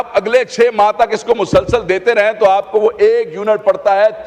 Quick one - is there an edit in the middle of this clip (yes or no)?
no